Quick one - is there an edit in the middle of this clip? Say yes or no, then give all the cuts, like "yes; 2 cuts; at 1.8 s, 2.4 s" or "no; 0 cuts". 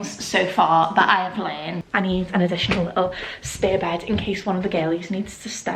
yes; 1 cut; at 1.8 s